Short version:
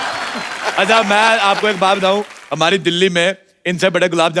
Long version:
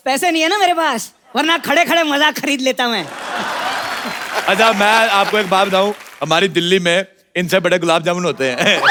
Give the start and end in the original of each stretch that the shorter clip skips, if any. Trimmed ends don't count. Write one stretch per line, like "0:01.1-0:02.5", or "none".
none